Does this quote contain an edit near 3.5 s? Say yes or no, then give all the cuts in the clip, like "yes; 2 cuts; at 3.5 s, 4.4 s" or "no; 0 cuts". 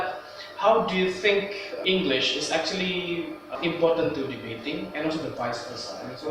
yes; 2 cuts; at 1.6 s, 3.5 s